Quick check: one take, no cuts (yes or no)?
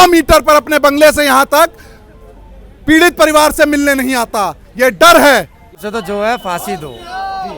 no